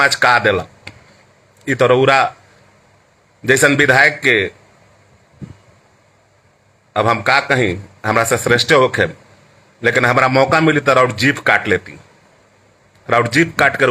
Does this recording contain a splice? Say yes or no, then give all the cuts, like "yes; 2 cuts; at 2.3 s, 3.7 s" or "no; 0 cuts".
no; 0 cuts